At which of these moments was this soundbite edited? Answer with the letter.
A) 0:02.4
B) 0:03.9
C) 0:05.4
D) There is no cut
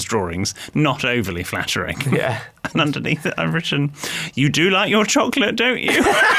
D